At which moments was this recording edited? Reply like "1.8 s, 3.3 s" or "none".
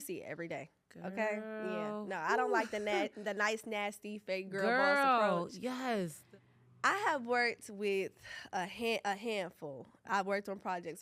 6.2 s